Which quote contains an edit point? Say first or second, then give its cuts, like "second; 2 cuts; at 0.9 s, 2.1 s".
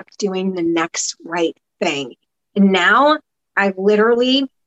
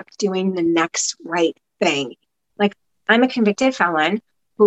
second; 1 cut; at 2.4 s